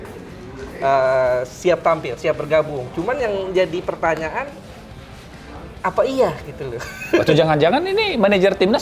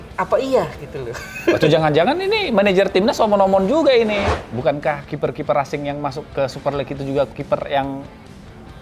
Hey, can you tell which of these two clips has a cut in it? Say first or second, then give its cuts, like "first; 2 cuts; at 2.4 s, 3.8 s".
second; 2 cuts; at 4.2 s, 7.3 s